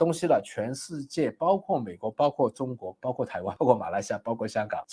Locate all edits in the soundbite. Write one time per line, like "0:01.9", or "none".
none